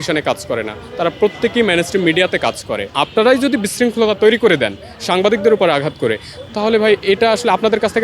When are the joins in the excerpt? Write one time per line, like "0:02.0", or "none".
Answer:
0:02.9